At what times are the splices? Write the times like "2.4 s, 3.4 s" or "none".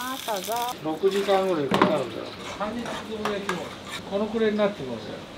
0.7 s, 2.4 s, 4.0 s